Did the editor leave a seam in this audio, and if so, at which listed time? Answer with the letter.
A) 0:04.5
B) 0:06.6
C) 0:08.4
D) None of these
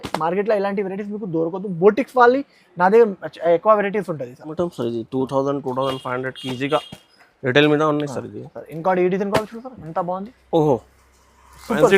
A